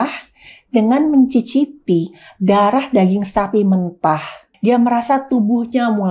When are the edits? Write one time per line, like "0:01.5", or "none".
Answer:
0:04.4